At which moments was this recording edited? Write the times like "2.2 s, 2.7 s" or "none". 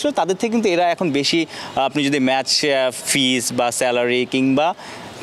none